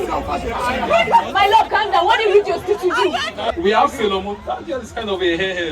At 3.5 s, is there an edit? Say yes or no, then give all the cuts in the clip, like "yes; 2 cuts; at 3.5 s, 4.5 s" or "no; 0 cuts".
yes; 1 cut; at 3.5 s